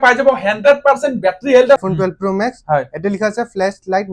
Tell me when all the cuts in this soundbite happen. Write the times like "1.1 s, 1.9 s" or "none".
1.8 s